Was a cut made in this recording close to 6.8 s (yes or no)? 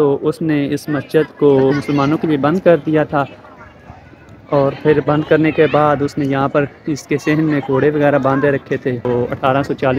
no